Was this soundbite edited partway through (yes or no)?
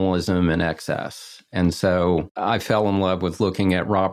yes